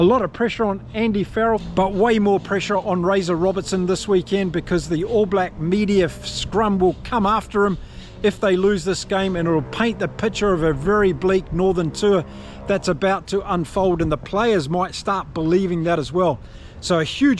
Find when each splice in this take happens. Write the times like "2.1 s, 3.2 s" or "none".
1.7 s